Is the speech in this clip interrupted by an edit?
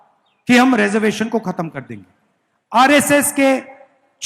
no; 0 cuts

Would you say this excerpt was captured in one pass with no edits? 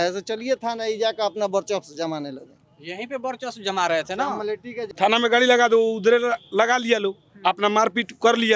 no; 1 cut; at 4.8 s

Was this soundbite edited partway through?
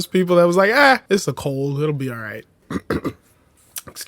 yes; 2 cuts; at 1.0 s, 2.5 s

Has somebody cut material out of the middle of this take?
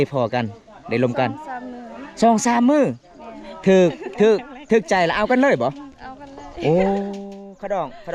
no; 0 cuts

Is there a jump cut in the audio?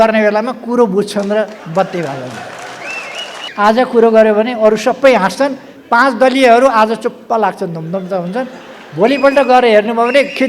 yes; 1 cut; at 3.5 s

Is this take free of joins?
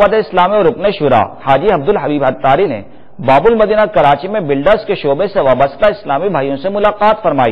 no; 2 cuts; at 1.4 s, 2.7 s

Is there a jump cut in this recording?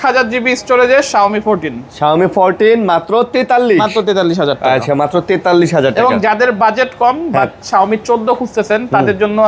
no; 0 cuts

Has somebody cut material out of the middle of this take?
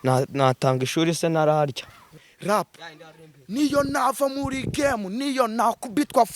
yes; 1 cut; at 2.0 s

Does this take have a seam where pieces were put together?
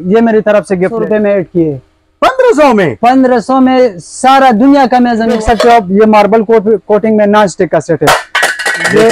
yes; 2 cuts; at 1.0 s, 5.4 s

